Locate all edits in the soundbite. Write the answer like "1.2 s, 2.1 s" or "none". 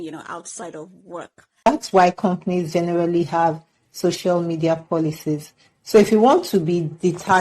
1.7 s